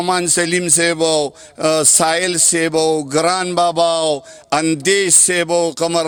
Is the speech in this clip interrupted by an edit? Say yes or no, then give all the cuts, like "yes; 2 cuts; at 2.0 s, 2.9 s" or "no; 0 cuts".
no; 0 cuts